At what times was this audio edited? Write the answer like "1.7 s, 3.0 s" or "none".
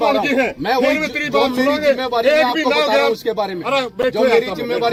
none

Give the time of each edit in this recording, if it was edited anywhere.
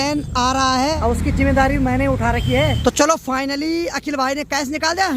1.0 s, 2.8 s

